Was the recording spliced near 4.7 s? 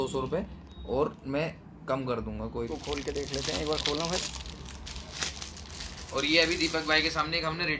no; 1 cut; at 2.5 s

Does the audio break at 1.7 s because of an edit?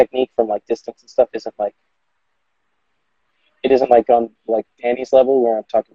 no; 0 cuts

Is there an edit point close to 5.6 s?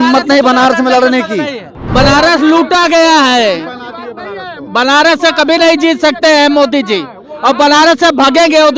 no; 1 cut; at 1.9 s

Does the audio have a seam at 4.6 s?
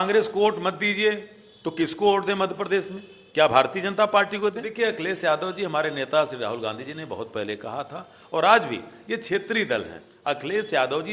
yes; 2 cuts; at 4.6 s, 10.1 s

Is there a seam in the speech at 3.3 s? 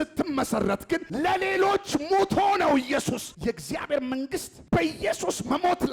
yes; 2 cuts; at 1.1 s, 3.3 s

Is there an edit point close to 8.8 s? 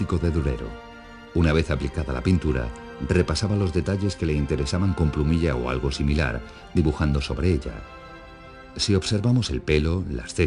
yes; 1 cut; at 8.8 s

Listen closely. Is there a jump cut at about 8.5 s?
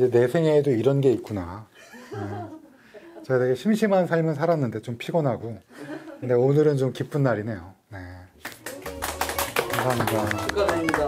no; 0 cuts

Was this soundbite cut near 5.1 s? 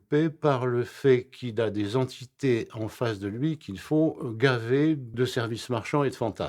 yes; 1 cut; at 5.1 s

